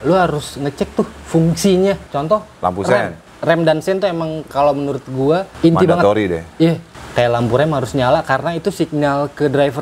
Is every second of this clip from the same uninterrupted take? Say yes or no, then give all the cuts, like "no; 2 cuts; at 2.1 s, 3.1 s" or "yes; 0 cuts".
no; 3 cuts; at 3.2 s, 5.5 s, 6.9 s